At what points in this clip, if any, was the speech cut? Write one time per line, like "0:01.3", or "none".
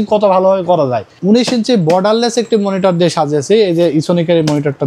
0:01.1